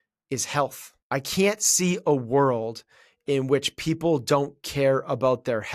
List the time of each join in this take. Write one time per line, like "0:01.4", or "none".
0:01.0

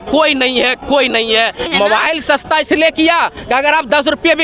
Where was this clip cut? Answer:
0:01.7

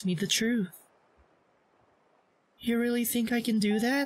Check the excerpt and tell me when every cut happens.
none

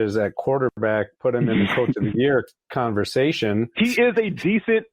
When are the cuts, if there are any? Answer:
0:03.7

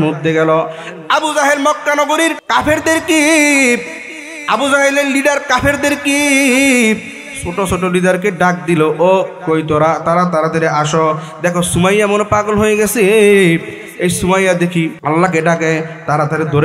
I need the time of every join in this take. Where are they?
0:02.4
0:15.0

